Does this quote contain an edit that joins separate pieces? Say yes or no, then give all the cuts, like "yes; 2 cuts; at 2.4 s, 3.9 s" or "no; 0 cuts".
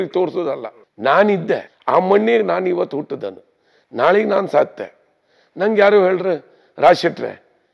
yes; 1 cut; at 1.7 s